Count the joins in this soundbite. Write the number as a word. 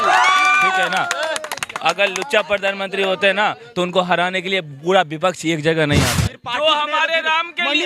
one